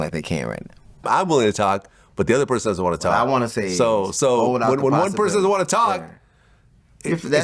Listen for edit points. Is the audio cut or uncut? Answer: cut